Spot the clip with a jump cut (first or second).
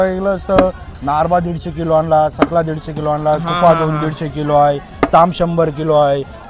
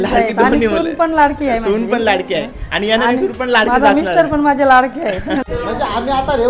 second